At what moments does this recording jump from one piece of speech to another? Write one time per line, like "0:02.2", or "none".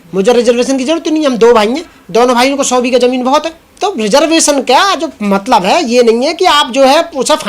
0:03.6